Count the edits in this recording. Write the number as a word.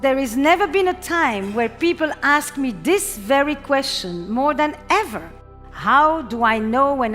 one